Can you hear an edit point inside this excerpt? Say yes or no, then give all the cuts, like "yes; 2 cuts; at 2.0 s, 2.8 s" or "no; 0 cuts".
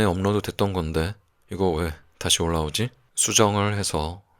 yes; 1 cut; at 3.1 s